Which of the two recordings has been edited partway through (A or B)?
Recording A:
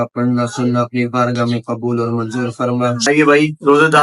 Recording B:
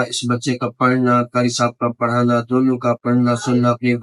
A